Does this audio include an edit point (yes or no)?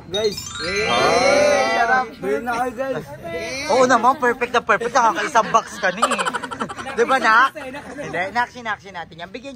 no